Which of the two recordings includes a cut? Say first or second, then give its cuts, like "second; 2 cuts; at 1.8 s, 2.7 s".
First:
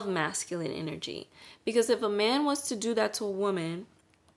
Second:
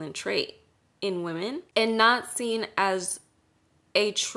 second; 1 cut; at 1.7 s